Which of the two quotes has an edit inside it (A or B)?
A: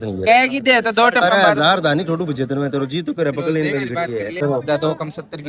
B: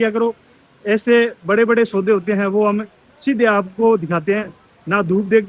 A